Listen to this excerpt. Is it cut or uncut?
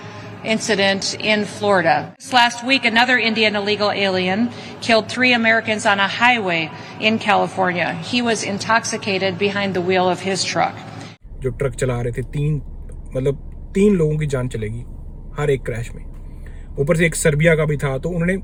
uncut